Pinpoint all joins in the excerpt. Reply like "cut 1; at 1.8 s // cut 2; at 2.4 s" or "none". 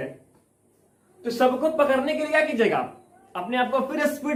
none